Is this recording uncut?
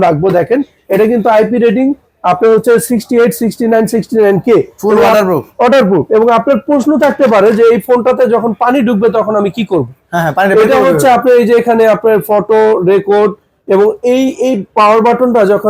yes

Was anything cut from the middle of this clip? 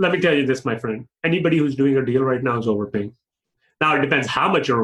no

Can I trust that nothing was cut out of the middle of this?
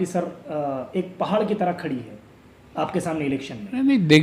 yes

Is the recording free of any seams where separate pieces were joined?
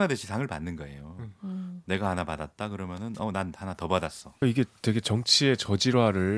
no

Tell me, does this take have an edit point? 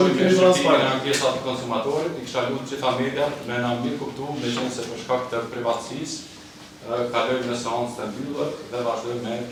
no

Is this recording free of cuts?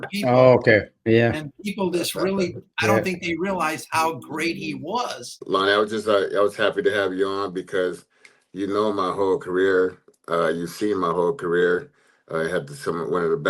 no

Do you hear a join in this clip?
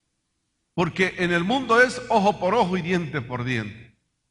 yes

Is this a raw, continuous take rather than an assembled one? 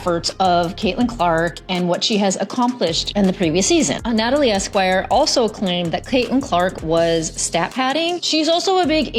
no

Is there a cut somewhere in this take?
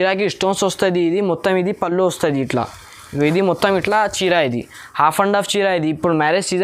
no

